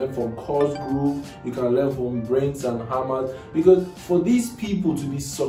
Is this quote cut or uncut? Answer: uncut